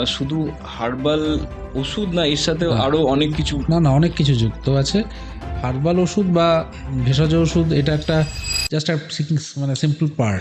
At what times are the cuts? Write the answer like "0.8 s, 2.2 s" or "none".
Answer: none